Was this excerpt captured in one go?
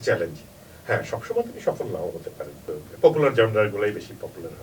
no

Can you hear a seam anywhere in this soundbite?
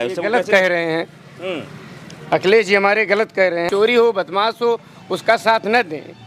yes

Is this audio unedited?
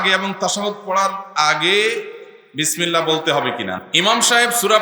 no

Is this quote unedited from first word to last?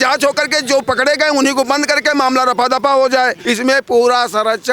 no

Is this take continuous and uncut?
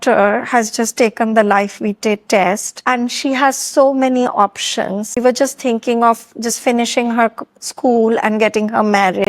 no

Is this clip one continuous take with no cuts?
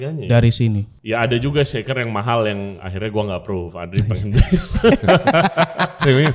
no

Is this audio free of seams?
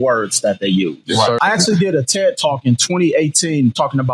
no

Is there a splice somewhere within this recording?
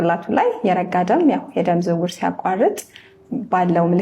no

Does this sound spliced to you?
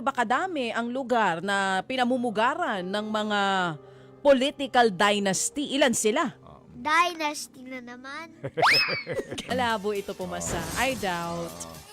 yes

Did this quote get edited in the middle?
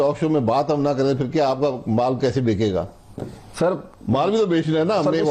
no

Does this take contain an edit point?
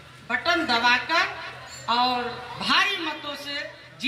no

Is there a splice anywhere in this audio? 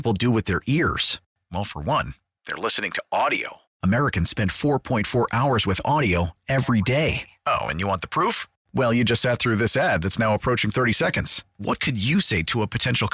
no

